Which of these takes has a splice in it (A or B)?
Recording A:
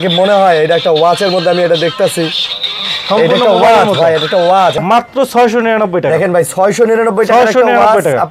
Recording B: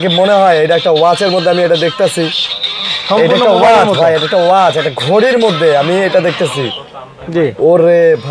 A